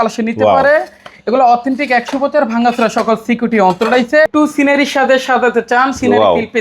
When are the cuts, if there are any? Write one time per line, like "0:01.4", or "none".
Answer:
0:04.3